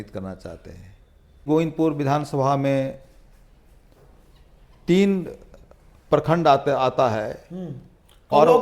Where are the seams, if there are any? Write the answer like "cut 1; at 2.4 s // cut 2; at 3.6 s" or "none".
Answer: cut 1; at 1.4 s